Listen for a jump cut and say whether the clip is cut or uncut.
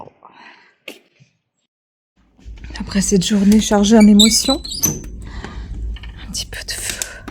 uncut